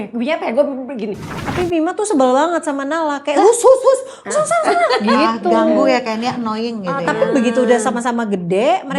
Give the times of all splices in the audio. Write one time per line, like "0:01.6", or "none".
0:01.4